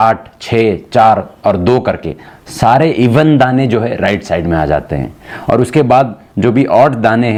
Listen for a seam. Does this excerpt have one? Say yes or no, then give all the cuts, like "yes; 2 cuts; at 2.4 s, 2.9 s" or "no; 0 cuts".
no; 0 cuts